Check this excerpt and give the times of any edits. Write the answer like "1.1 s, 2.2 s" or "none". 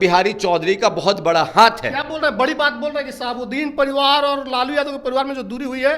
none